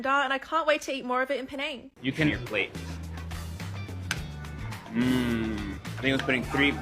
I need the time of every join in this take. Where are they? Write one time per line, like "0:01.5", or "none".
0:02.3